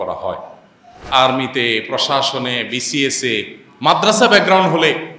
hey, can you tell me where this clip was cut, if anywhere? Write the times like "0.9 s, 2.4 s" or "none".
1.0 s